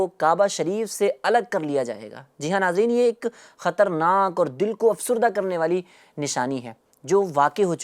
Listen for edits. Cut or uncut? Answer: uncut